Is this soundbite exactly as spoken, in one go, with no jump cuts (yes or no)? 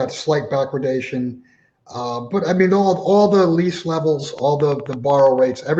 yes